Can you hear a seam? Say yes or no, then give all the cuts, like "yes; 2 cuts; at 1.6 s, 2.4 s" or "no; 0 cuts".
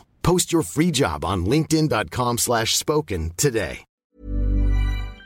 yes; 1 cut; at 3.9 s